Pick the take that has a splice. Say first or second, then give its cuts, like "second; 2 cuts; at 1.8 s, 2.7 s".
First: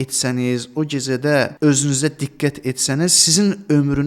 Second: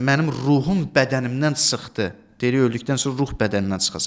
first; 1 cut; at 1.5 s